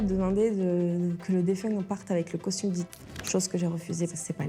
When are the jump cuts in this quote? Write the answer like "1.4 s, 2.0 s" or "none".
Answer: none